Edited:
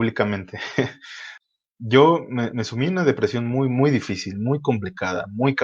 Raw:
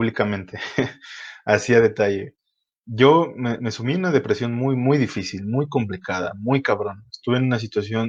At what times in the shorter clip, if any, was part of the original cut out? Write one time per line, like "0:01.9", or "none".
0:01.3